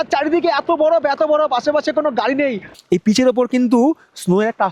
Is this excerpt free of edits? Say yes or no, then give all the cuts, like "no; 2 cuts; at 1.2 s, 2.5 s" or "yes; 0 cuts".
no; 1 cut; at 2.7 s